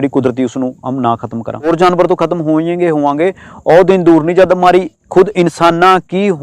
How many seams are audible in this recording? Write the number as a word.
one